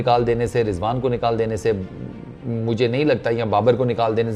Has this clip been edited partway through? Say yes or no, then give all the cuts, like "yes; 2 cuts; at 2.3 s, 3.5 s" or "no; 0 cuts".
no; 0 cuts